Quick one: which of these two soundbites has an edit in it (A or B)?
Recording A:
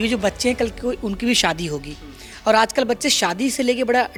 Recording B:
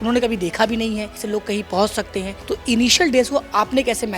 B